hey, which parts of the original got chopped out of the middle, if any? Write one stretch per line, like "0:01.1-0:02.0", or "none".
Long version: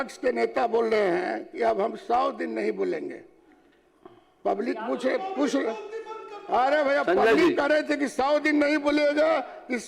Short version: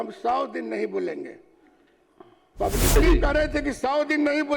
0:04.8-0:07.3